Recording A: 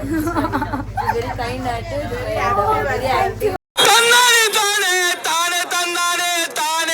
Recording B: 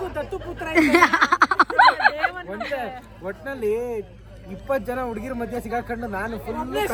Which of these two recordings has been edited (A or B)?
A